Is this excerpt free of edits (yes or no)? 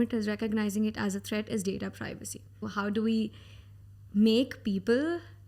no